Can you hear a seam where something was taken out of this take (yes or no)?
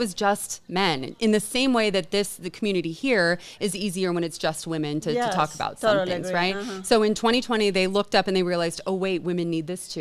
no